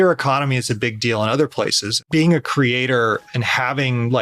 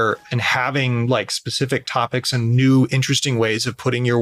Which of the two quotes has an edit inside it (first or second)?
first